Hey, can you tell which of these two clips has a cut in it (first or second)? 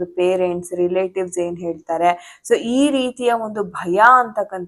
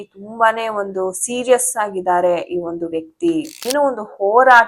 second